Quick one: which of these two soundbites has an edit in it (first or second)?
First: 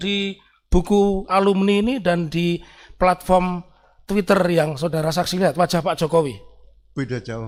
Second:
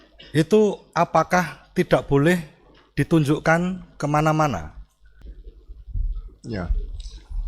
second